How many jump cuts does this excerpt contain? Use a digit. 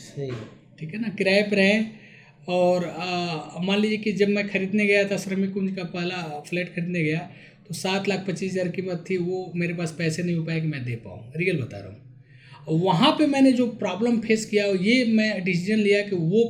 0